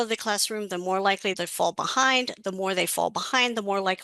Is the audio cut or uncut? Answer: cut